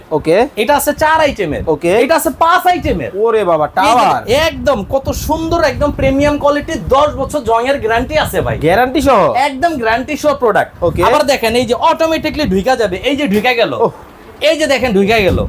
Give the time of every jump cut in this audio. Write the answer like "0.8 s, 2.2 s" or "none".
none

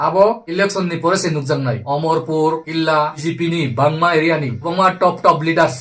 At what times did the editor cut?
3.2 s

